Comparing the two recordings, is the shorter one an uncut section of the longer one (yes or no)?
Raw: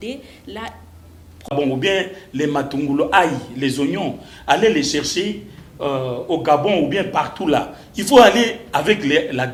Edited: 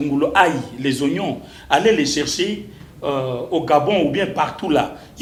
yes